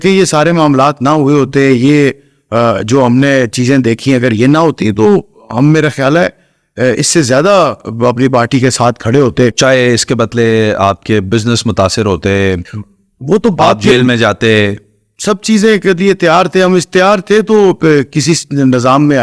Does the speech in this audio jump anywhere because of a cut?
no; 0 cuts

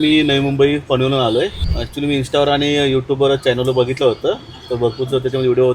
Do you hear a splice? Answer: yes; 1 cut; at 1.7 s

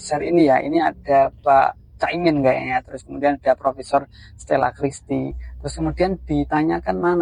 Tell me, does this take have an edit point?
no; 0 cuts

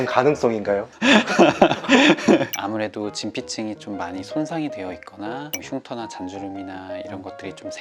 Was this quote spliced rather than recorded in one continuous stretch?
yes; 1 cut; at 2.5 s

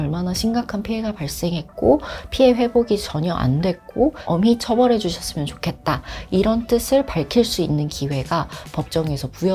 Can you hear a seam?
no; 0 cuts

